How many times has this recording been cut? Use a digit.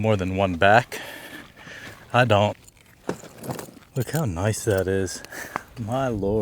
2